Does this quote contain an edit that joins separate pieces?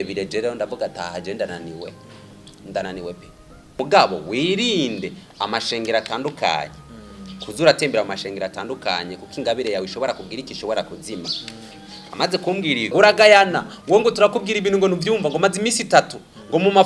yes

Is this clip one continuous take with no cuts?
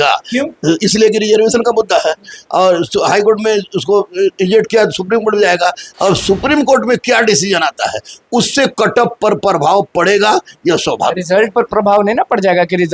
yes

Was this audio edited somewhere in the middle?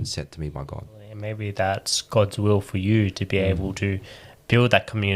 yes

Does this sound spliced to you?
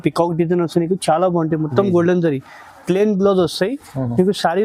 no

